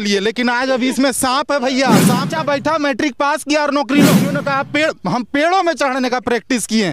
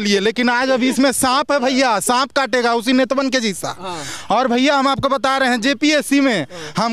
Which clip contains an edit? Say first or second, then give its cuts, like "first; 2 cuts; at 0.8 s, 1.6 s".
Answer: first; 2 cuts; at 2.3 s, 4.3 s